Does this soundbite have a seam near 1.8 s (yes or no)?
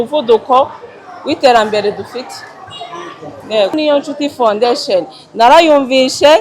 no